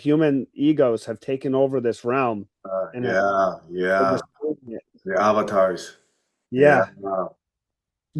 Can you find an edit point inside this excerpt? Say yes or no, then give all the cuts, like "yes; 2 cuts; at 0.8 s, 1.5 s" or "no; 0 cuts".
no; 0 cuts